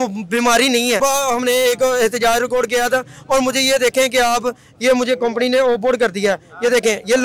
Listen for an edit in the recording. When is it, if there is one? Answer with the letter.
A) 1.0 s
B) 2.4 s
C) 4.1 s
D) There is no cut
A